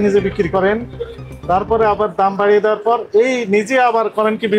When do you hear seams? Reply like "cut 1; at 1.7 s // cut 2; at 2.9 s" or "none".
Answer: none